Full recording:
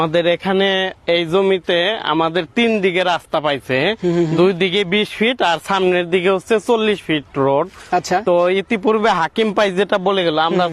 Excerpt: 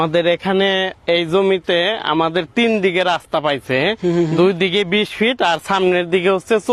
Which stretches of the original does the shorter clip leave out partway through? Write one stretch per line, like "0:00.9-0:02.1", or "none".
none